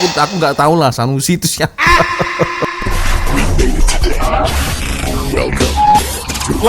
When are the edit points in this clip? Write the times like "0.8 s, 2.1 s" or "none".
2.8 s